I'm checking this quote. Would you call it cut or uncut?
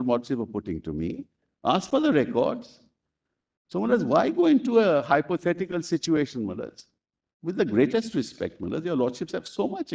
uncut